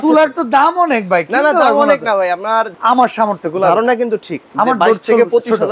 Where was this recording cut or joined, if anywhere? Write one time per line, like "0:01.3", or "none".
0:02.7
0:04.4